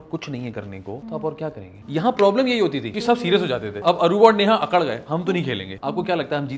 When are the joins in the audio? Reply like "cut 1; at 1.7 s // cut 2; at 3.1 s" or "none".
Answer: cut 1; at 1.0 s // cut 2; at 1.7 s // cut 3; at 2.9 s // cut 4; at 3.7 s // cut 5; at 5.7 s

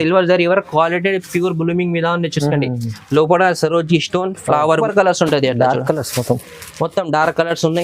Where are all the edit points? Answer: cut 1; at 4.8 s

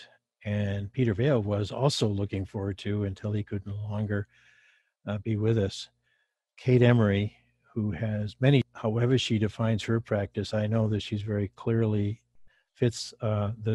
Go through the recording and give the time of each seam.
cut 1; at 8.7 s

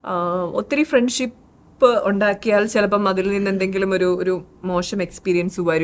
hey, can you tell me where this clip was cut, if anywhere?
none

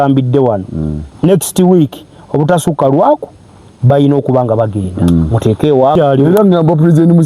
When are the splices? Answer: cut 1; at 5.9 s

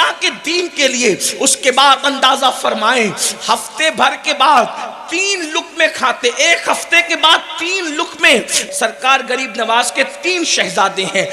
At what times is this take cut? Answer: cut 1; at 8.6 s

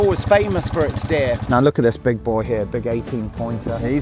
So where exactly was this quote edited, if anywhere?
cut 1; at 1.4 s

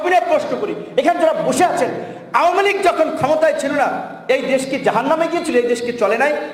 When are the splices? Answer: none

